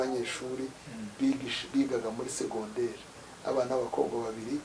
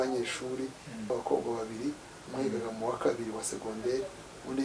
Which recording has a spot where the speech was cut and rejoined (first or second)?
second